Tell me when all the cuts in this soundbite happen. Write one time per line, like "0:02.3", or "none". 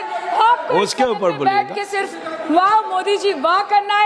none